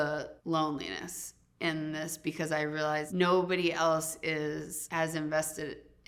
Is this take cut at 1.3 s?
no; 0 cuts

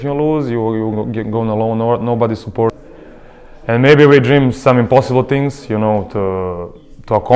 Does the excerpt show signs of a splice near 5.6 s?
no; 1 cut; at 2.8 s

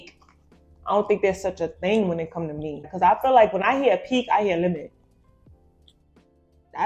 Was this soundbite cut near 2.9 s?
yes; 1 cut; at 2.9 s

